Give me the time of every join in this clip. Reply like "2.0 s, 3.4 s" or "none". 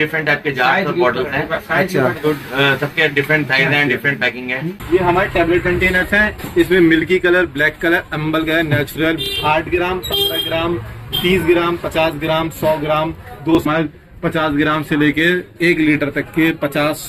4.7 s, 9.3 s, 13.6 s